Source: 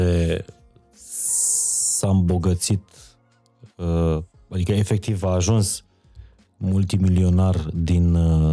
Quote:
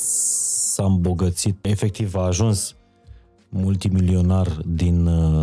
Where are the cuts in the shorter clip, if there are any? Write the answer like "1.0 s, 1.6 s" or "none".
1.7 s